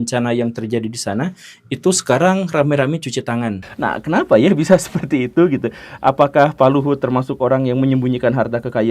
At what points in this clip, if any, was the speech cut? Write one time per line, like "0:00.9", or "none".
0:03.6